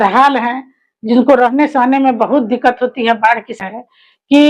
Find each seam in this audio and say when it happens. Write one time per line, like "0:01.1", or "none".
0:03.6